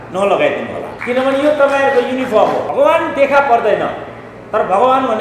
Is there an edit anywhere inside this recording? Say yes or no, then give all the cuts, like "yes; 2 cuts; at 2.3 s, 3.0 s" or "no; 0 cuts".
yes; 2 cuts; at 0.9 s, 2.7 s